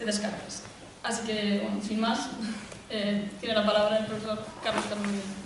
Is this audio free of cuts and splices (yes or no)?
no